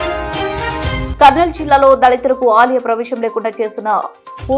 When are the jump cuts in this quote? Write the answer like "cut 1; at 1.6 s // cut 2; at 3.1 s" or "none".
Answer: cut 1; at 1.1 s